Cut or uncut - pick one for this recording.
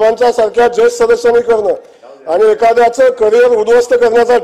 uncut